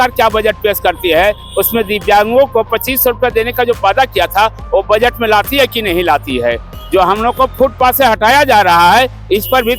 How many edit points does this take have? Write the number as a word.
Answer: one